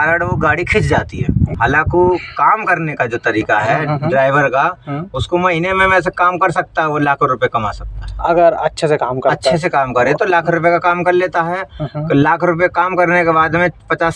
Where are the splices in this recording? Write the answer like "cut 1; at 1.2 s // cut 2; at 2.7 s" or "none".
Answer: none